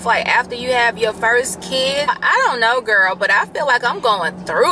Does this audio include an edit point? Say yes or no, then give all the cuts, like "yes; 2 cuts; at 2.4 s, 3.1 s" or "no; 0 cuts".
yes; 1 cut; at 2.1 s